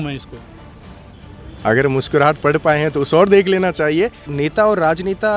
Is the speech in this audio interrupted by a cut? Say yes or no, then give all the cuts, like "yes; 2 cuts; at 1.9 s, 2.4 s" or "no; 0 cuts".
yes; 1 cut; at 4.3 s